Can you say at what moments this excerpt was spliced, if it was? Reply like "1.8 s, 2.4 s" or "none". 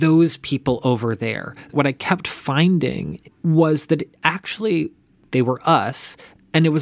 1.7 s, 3.1 s, 5.1 s